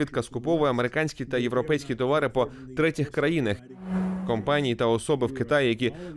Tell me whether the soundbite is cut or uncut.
cut